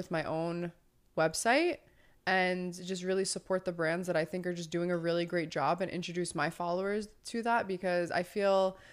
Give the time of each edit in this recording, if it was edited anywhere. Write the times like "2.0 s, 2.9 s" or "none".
none